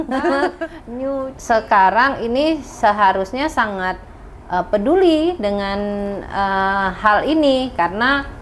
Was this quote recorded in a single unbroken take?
no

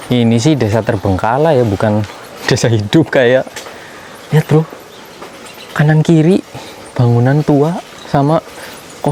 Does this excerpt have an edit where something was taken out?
no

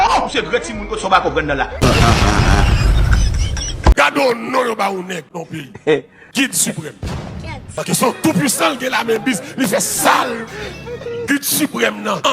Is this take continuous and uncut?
no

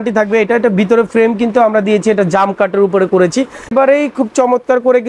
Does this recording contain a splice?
yes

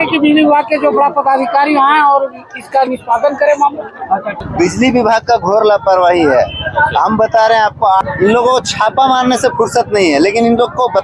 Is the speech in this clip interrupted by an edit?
yes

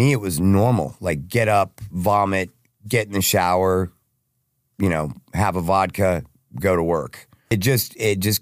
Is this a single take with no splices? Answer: no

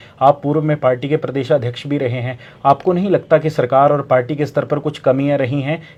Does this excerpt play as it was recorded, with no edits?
yes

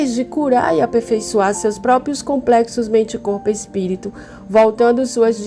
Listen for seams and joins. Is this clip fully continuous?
yes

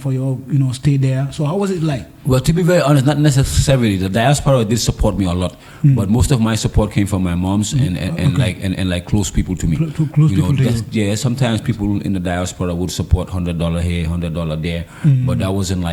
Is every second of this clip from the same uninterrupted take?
yes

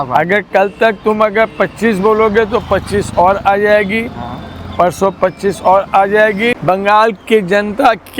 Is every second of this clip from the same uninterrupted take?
no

